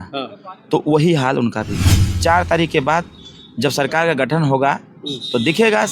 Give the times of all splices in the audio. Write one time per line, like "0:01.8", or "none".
0:01.8